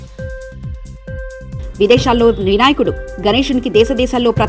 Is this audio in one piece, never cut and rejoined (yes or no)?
no